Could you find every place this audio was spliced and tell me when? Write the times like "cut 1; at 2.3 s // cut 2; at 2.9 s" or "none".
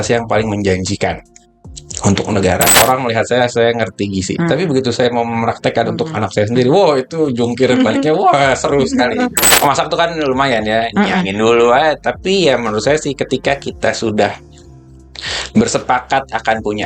cut 1; at 2.7 s // cut 2; at 9.4 s